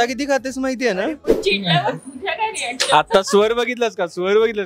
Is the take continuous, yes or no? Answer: no